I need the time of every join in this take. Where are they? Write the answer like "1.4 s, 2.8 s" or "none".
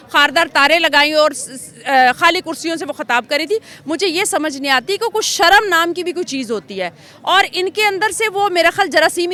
none